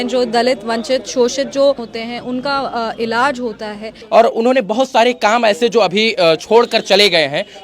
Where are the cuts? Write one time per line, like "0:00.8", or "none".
0:01.9
0:03.9